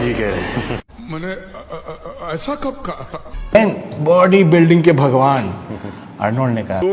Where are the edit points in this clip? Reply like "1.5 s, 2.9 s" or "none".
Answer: 3.5 s